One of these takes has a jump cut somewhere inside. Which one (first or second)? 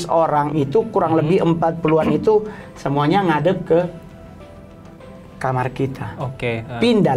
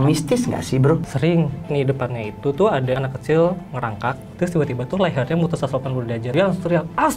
second